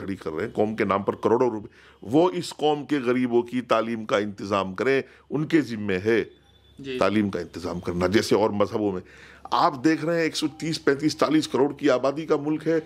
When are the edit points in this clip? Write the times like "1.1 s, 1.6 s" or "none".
none